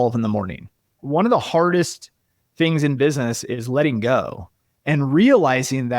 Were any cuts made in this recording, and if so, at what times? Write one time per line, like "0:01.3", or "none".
0:00.9